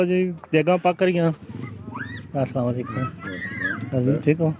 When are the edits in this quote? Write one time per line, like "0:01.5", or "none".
none